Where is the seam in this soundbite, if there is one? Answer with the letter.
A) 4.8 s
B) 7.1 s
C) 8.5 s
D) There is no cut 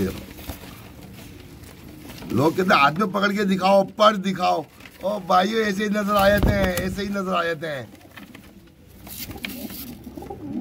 D